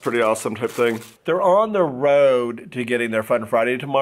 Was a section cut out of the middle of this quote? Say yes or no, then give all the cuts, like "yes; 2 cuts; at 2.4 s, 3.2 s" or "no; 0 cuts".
yes; 1 cut; at 1.1 s